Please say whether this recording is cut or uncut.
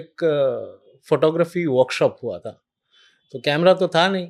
uncut